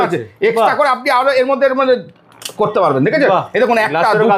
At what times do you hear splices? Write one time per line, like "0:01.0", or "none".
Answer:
none